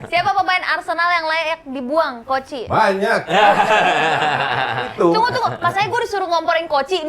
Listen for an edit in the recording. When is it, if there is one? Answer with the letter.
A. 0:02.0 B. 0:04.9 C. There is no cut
B